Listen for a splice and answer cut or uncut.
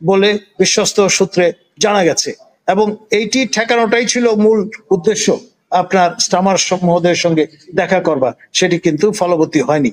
uncut